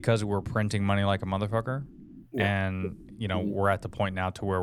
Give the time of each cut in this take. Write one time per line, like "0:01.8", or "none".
none